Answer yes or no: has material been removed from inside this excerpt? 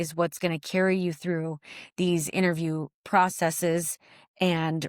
no